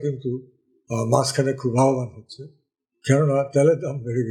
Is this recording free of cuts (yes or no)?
yes